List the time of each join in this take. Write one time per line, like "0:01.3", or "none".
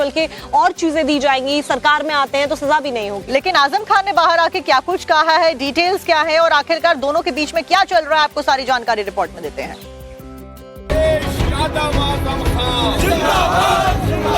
0:09.4